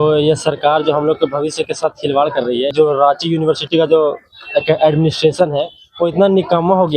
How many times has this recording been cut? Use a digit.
1